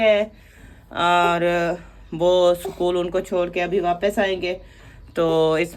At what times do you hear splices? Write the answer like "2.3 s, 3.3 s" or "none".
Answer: none